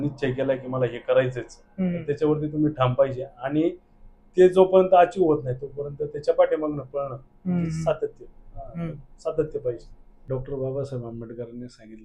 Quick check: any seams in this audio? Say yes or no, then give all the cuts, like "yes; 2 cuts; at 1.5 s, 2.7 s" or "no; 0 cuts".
yes; 1 cut; at 10.3 s